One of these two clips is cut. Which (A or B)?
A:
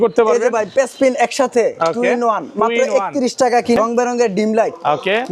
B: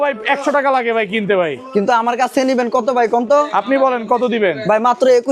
A